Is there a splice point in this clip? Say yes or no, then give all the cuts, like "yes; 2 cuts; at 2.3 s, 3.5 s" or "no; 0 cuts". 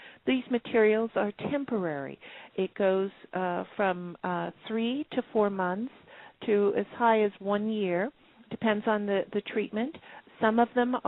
no; 0 cuts